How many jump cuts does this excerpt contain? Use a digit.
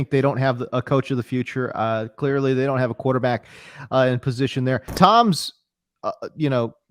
1